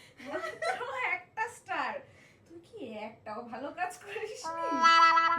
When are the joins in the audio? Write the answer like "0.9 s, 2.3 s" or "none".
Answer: 4.5 s